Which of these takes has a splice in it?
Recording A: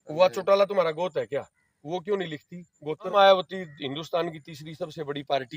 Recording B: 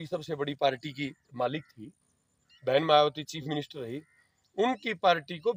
A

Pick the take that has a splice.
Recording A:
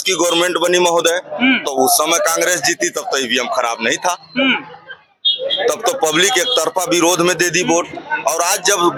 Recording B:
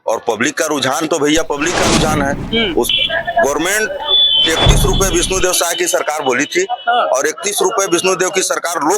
B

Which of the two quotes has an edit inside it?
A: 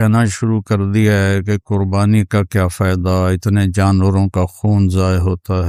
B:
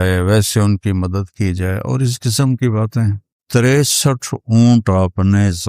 B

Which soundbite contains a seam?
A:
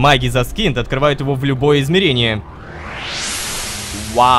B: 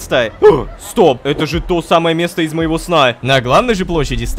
B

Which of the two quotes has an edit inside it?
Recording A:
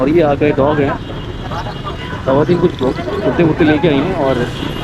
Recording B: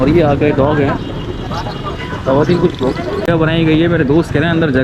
B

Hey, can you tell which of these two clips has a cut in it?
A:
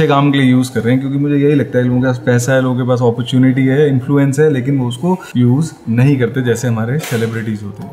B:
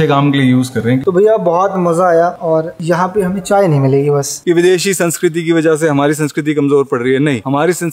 B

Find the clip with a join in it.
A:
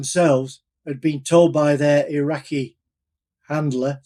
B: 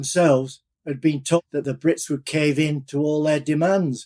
B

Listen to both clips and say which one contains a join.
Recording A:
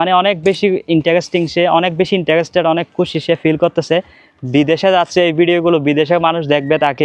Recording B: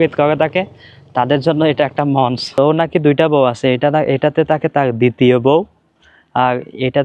B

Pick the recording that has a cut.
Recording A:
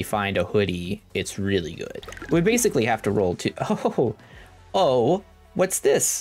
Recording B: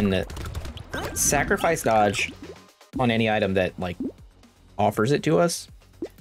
A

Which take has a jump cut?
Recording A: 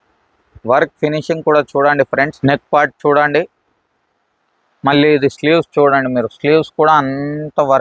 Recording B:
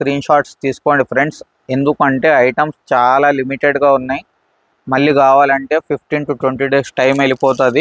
A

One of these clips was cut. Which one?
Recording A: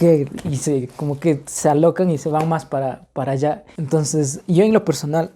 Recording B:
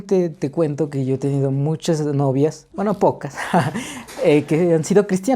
A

